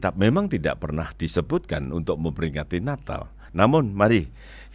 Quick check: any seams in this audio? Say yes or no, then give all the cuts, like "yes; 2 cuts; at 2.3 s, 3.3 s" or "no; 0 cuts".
yes; 1 cut; at 3.4 s